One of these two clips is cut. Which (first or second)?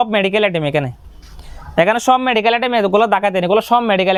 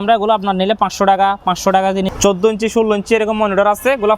second